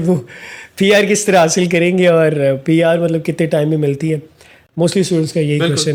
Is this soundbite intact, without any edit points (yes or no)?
yes